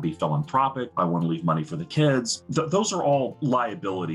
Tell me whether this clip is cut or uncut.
cut